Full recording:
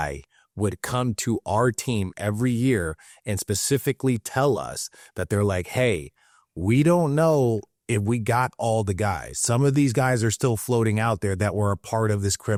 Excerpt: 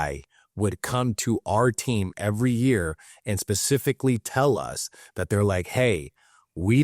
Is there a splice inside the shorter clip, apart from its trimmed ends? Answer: no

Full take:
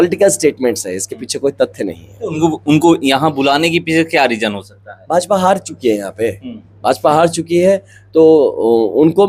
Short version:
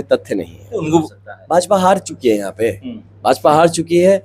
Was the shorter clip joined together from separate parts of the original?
yes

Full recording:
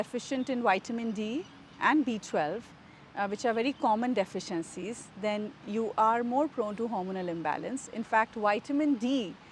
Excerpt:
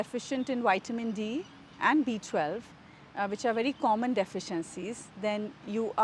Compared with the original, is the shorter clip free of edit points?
yes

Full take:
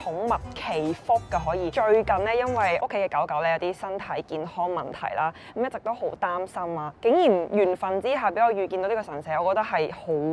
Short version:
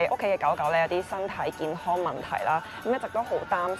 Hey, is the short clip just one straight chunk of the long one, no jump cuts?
yes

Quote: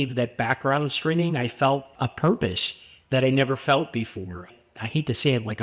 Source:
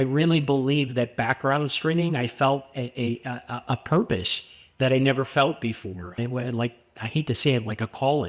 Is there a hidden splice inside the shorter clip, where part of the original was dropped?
yes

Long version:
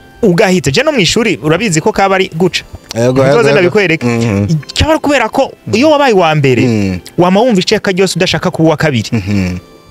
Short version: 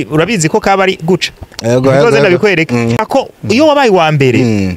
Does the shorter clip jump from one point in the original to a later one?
yes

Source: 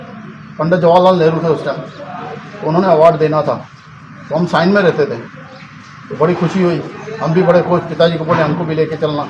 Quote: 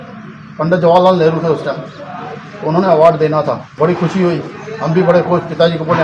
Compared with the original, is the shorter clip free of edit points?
no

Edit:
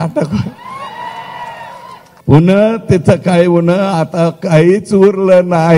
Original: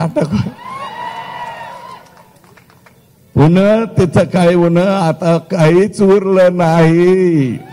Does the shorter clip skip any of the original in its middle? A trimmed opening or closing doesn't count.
yes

